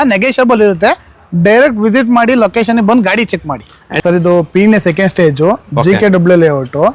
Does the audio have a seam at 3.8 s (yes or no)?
yes